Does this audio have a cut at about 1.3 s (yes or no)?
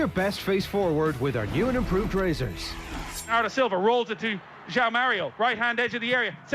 no